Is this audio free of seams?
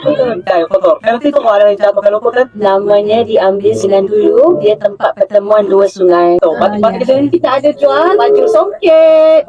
no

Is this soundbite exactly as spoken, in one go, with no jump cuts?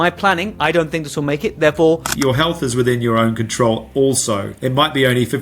no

